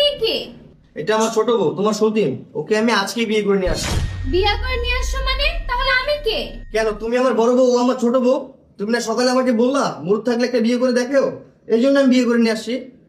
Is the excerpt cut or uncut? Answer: uncut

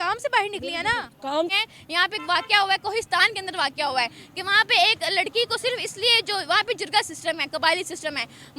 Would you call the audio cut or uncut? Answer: cut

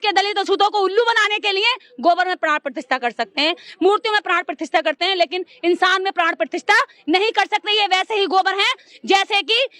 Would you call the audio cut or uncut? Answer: uncut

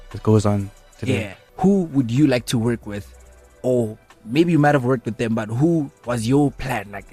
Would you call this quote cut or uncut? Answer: cut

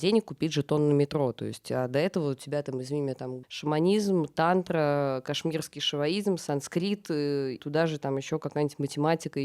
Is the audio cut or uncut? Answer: cut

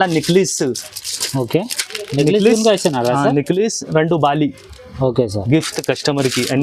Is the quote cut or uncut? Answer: uncut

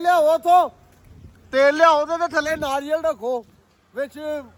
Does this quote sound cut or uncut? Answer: uncut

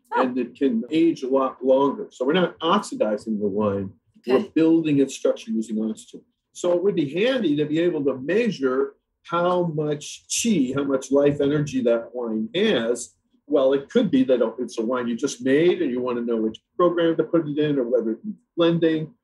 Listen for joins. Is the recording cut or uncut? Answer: uncut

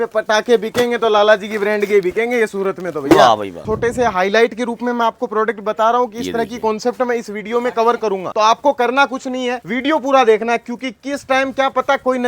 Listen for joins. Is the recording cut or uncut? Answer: cut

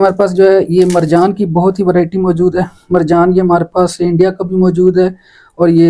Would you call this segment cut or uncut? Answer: uncut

